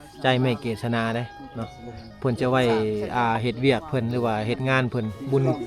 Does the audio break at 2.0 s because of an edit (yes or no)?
no